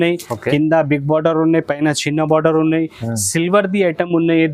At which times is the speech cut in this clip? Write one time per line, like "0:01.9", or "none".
none